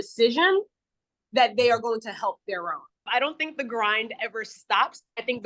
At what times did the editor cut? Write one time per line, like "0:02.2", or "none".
0:03.1